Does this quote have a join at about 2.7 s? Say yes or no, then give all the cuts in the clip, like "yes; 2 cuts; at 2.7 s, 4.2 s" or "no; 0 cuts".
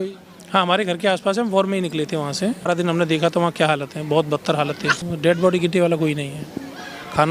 yes; 2 cuts; at 2.7 s, 5.0 s